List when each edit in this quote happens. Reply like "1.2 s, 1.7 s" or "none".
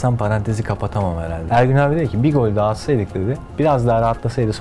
1.4 s, 3.4 s